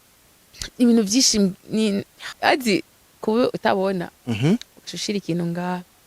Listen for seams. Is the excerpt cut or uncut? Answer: cut